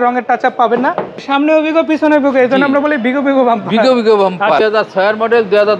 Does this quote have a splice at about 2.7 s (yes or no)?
no